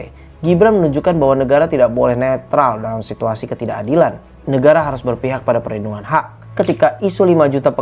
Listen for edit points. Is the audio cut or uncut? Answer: cut